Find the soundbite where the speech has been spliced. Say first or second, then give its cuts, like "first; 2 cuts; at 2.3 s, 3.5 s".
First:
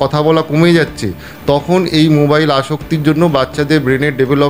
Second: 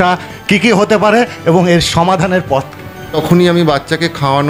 second; 1 cut; at 3.1 s